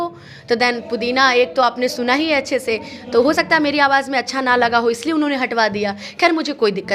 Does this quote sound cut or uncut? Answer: uncut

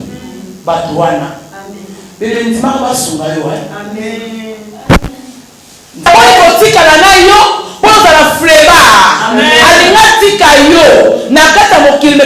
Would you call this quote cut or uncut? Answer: cut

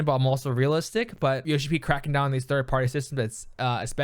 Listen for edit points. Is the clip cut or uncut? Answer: cut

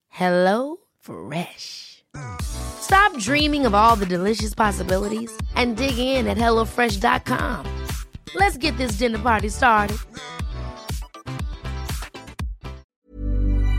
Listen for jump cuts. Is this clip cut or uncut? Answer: cut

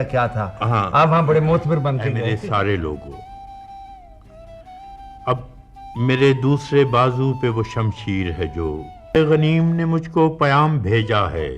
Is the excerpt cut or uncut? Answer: cut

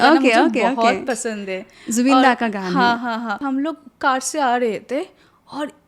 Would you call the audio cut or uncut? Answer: cut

